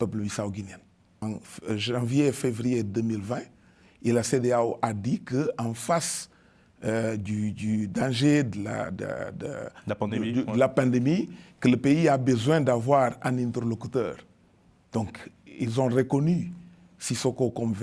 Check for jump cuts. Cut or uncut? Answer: cut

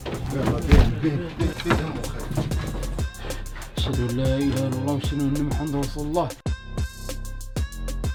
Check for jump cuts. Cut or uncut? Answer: uncut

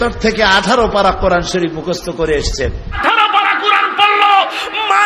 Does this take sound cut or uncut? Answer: cut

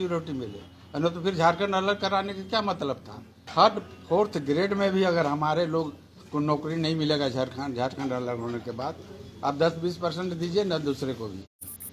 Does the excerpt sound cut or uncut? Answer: cut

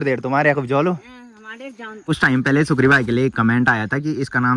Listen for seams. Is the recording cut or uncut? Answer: cut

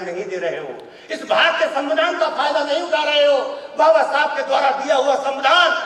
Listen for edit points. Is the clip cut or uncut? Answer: uncut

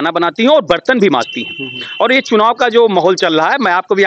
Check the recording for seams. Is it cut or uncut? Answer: uncut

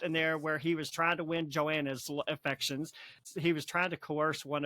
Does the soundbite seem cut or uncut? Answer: cut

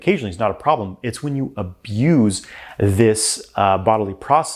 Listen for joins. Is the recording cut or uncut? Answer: uncut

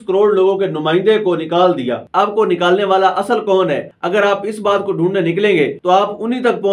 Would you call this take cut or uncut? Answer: cut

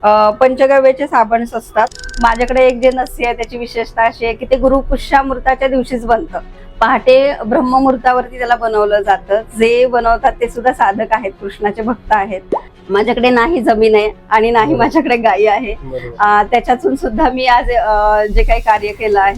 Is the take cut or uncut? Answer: cut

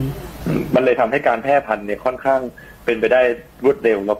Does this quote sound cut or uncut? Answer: uncut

